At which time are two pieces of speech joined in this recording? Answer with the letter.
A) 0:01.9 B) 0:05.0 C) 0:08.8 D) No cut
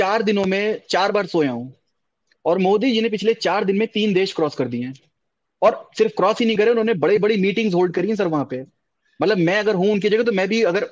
D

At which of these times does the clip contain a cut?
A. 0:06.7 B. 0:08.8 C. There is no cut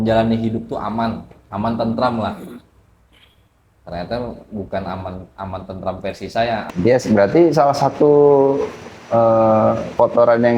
A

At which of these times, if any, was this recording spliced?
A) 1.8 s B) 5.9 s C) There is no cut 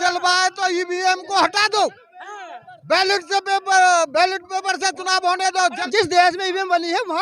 B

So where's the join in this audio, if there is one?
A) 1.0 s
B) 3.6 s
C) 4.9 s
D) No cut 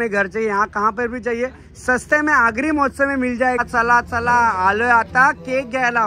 B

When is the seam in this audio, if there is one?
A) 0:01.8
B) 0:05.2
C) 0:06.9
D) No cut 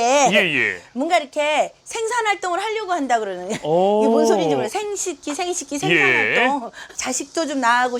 D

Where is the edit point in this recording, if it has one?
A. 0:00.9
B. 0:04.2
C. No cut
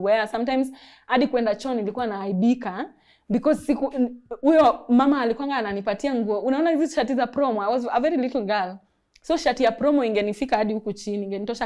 C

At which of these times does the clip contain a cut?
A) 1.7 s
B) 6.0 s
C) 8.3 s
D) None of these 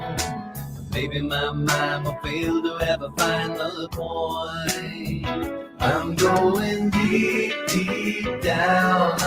C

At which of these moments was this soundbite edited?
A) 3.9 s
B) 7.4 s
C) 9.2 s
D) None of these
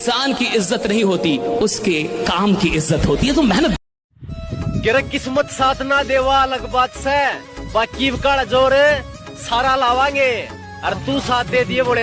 A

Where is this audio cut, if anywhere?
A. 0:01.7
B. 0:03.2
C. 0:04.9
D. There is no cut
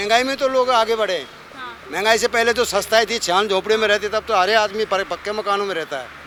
D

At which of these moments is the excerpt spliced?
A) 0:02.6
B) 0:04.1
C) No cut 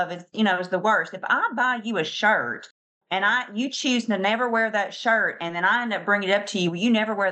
C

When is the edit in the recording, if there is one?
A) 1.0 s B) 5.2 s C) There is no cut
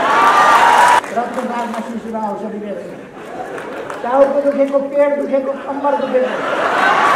A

